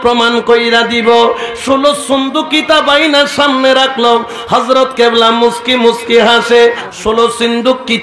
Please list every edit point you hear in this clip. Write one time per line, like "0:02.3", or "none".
0:06.8